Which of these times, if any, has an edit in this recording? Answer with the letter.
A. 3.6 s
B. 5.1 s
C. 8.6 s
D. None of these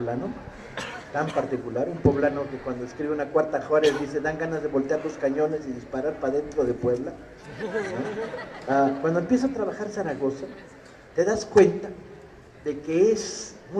D